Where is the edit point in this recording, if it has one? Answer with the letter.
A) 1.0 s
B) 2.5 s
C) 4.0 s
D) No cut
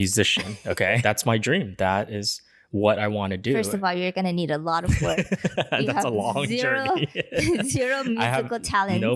A